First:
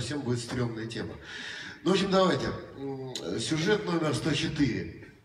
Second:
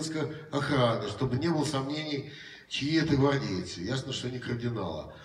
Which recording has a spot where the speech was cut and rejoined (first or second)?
first